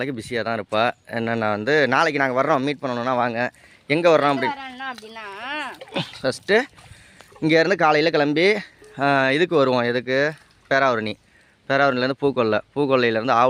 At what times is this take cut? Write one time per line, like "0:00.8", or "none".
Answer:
none